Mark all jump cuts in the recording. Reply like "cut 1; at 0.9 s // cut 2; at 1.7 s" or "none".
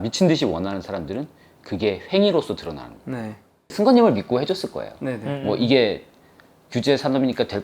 cut 1; at 3.7 s

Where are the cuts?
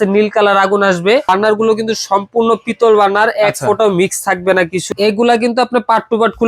cut 1; at 1.3 s // cut 2; at 4.8 s

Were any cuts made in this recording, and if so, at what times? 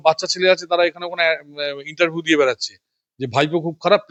none

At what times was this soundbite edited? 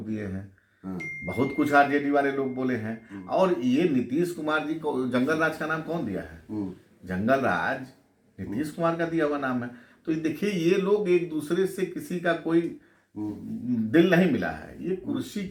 none

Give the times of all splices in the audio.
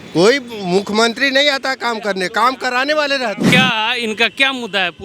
cut 1; at 3.5 s

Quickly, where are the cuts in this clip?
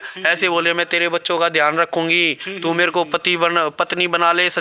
none

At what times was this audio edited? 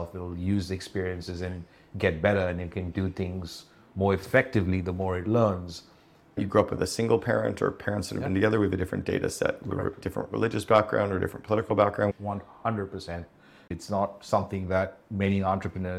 cut 1; at 6.4 s // cut 2; at 13.7 s

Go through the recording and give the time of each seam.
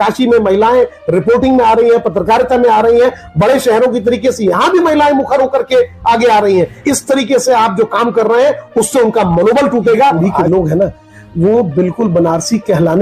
cut 1; at 6.8 s // cut 2; at 10.2 s

